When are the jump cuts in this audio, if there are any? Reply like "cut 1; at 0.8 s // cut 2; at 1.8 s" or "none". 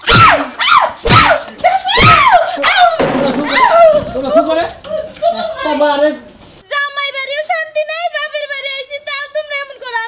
cut 1; at 6.3 s